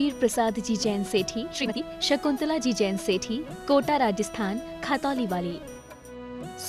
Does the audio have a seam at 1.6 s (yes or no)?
yes